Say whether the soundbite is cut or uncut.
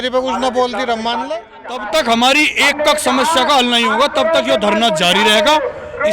cut